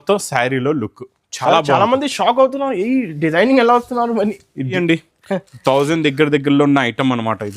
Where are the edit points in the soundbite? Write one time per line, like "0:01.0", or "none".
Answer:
0:04.7